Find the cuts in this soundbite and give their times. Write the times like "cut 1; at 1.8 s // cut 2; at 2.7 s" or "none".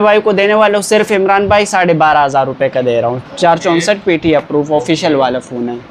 none